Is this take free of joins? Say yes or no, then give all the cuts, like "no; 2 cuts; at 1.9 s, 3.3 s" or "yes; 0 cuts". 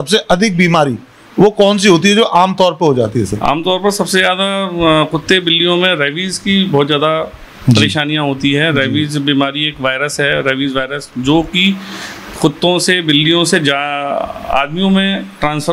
yes; 0 cuts